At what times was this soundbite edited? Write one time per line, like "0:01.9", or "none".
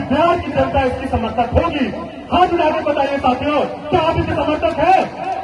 none